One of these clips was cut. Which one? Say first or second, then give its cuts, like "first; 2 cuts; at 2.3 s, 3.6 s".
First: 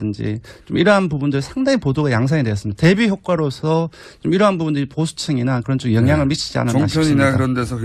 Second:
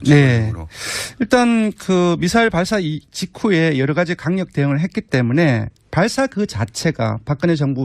second; 1 cut; at 3.6 s